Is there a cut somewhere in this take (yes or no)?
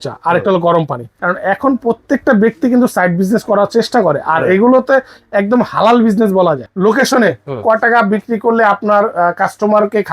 yes